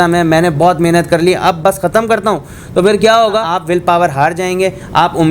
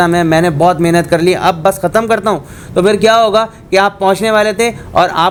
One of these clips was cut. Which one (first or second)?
first